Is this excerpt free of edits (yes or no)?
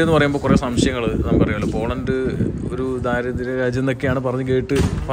yes